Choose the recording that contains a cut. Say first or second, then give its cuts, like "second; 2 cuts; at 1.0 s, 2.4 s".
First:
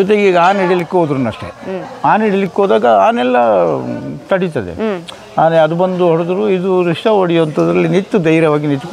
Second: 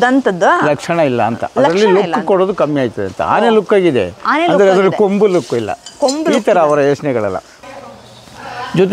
second; 1 cut; at 7.6 s